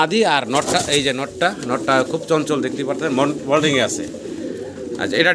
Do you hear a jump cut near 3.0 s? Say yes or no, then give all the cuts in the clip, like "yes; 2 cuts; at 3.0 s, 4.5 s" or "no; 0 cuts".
no; 0 cuts